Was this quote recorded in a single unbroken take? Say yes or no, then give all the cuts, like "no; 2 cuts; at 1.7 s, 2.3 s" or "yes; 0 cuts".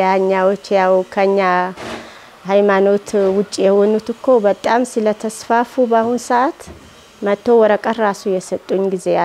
yes; 0 cuts